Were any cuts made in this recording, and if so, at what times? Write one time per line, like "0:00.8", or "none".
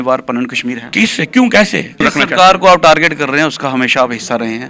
0:02.1